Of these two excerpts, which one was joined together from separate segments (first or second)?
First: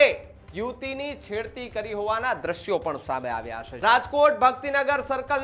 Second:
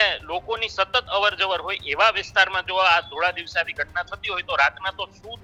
first